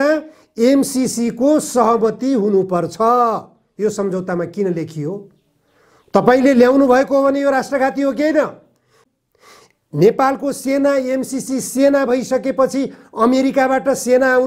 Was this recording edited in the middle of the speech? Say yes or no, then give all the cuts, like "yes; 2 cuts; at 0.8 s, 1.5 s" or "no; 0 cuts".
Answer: yes; 1 cut; at 8.9 s